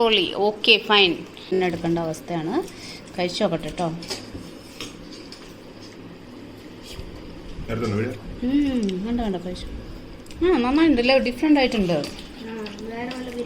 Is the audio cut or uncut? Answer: cut